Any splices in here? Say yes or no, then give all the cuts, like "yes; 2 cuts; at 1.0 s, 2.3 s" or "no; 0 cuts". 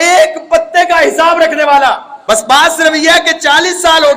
yes; 1 cut; at 2.1 s